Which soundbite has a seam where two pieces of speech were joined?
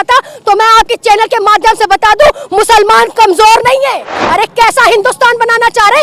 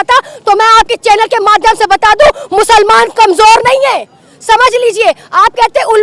first; 1 cut; at 4.2 s

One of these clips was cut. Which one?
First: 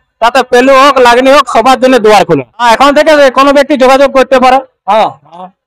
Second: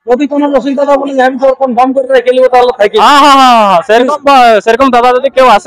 first; 1 cut; at 2.6 s

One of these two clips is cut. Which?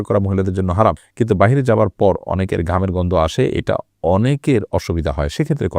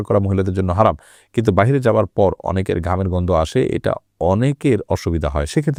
first; 1 cut; at 1.1 s

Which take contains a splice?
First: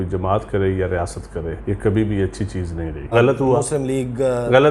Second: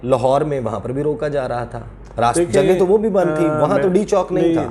first; 2 cuts; at 1.5 s, 3.1 s

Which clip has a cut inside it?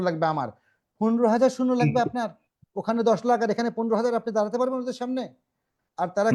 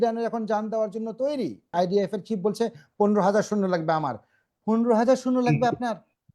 second; 1 cut; at 1.7 s

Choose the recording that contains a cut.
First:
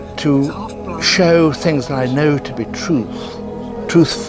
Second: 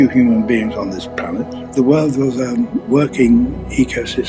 second; 2 cuts; at 1.7 s, 2.8 s

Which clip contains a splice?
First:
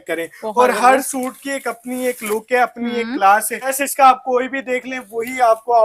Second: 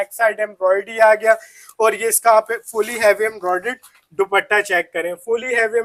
first; 1 cut; at 3.8 s

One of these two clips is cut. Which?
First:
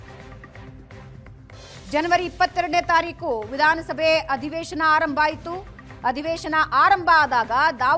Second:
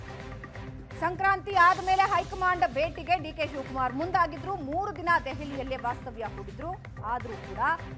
first; 1 cut; at 1.0 s

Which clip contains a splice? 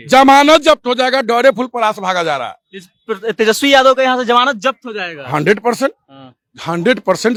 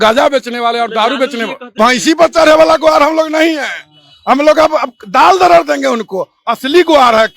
second; 1 cut; at 1.8 s

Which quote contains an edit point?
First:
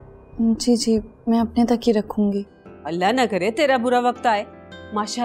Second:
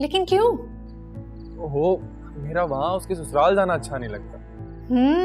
first; 1 cut; at 2.6 s

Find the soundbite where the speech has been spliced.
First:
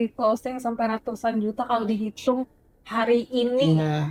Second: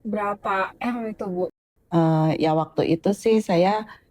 second; 1 cut; at 1.5 s

